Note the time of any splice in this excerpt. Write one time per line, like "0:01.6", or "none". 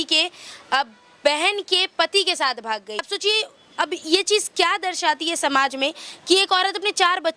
0:03.1